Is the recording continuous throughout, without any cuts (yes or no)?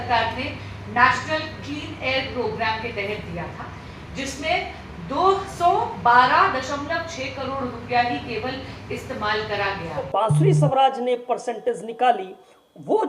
no